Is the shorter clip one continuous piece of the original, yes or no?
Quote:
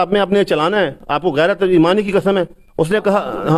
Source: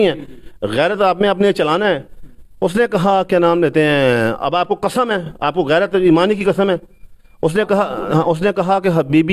no